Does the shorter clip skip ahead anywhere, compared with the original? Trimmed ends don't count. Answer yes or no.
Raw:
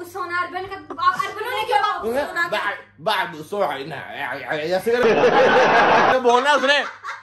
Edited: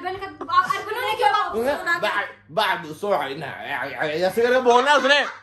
yes